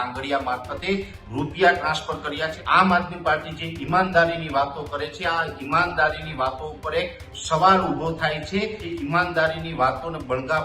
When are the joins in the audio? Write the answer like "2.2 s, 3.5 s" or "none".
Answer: 2.6 s, 8.8 s